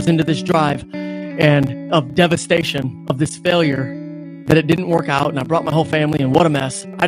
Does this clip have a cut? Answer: no; 0 cuts

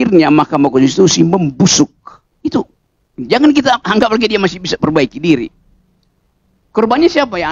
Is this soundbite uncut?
yes; 0 cuts

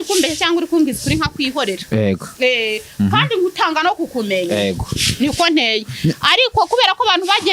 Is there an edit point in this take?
no; 0 cuts

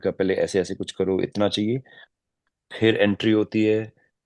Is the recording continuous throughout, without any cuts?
yes; 0 cuts

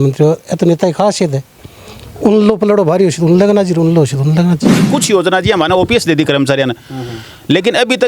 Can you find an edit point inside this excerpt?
yes; 1 cut; at 4.8 s

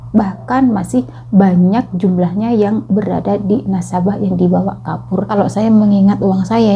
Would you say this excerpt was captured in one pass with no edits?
no; 1 cut; at 5.3 s

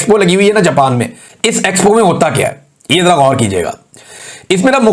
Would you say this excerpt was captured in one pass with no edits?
yes; 0 cuts

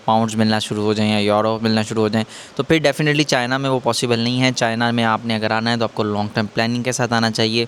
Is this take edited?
no; 0 cuts

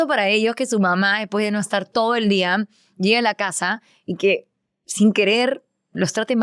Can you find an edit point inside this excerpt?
no; 0 cuts

